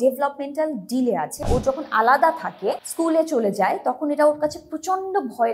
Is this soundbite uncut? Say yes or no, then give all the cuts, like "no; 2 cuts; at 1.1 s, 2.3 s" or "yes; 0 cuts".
no; 2 cuts; at 1.4 s, 2.9 s